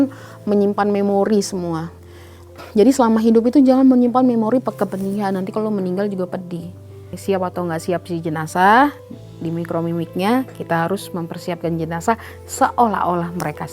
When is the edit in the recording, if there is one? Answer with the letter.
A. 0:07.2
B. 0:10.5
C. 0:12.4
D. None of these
A